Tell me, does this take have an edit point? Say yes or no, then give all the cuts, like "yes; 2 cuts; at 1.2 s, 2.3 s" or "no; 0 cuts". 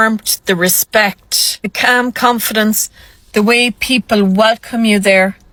no; 0 cuts